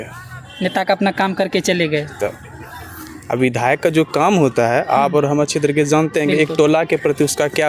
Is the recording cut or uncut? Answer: uncut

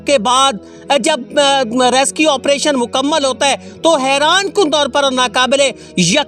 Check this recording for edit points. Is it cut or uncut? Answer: uncut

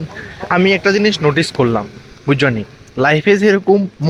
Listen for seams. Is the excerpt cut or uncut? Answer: uncut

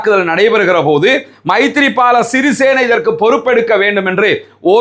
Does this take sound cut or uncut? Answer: uncut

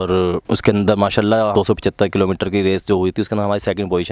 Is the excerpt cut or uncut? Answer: cut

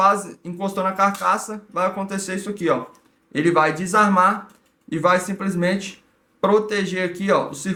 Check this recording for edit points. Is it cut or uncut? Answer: uncut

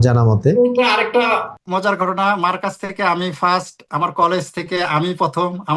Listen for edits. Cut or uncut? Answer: uncut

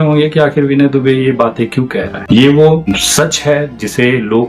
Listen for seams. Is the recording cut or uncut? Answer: cut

